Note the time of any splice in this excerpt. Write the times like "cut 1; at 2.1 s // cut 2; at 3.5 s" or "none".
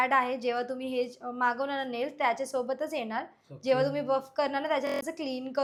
none